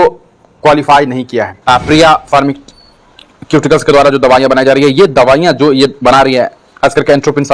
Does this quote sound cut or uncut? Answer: cut